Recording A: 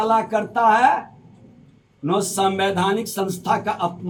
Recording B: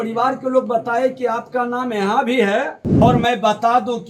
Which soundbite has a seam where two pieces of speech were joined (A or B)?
B